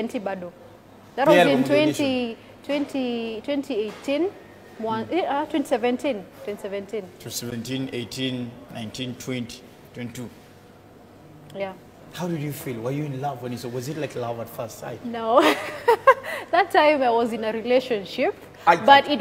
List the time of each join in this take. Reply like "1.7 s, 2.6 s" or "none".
none

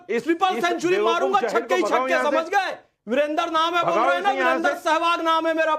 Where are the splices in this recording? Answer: none

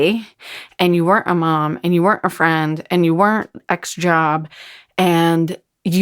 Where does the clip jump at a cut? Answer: none

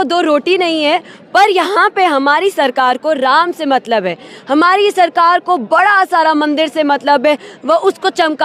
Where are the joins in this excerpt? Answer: none

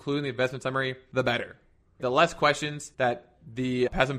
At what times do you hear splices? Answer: 1.0 s, 2.8 s

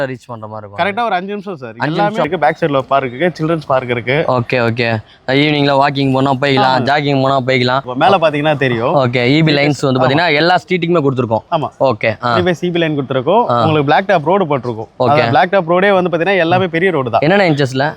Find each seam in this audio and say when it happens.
2.3 s, 7.9 s

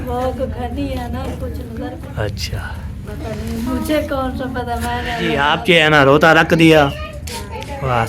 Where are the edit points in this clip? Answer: 2.0 s, 5.5 s

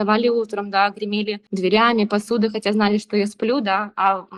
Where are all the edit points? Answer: none

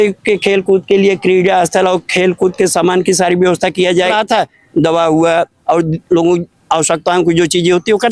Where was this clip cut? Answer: 4.1 s

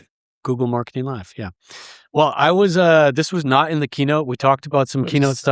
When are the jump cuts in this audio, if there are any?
none

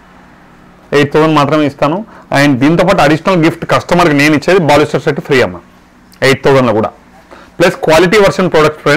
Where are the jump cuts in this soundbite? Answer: none

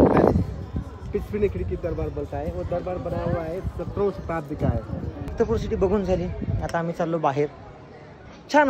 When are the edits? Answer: 5.3 s

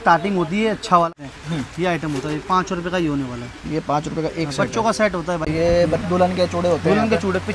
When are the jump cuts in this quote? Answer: 1.1 s, 5.5 s

